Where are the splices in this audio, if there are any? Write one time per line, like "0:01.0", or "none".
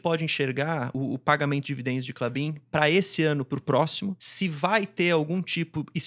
0:00.9
0:04.2